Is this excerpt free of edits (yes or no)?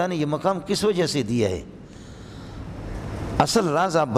yes